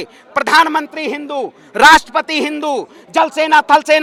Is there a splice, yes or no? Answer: no